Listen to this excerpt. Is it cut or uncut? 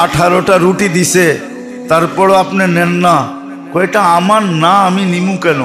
uncut